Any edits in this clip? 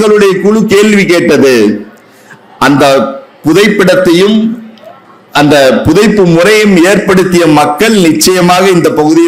no; 0 cuts

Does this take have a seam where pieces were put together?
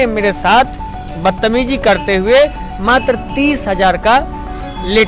no; 0 cuts

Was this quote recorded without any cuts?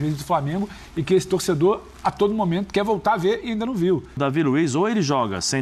no; 1 cut; at 4.2 s

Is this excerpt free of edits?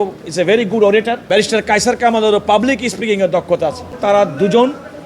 no; 2 cuts; at 1.0 s, 4.0 s

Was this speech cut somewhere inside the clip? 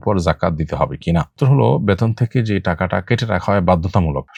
no; 0 cuts

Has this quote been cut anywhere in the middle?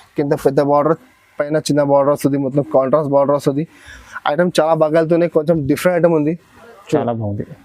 no; 0 cuts

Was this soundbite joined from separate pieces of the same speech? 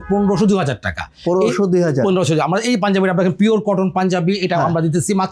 no; 0 cuts

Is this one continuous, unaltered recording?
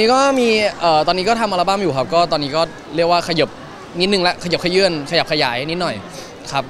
yes; 0 cuts

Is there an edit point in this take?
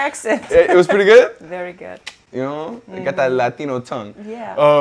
no; 0 cuts

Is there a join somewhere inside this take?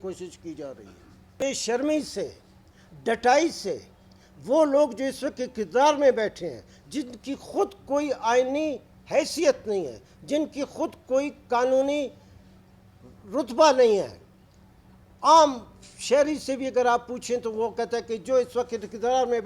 yes; 1 cut; at 1.3 s

